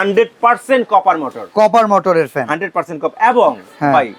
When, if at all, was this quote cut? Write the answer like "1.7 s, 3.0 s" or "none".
none

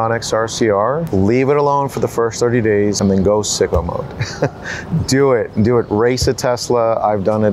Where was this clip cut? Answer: 1.1 s, 3.0 s

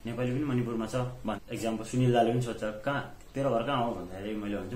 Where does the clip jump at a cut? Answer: 1.4 s

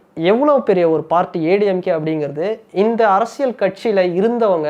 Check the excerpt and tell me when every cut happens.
none

